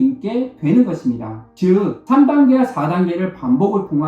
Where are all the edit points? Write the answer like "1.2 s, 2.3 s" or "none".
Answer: 1.5 s